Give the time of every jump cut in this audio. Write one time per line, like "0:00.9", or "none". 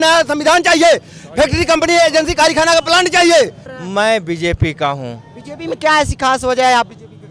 0:03.7